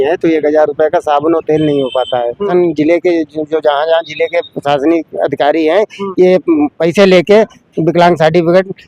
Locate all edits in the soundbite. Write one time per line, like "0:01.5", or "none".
0:02.5